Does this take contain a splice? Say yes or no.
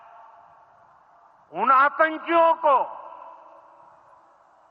yes